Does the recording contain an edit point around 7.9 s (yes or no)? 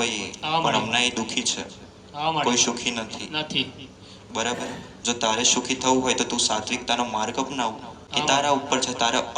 yes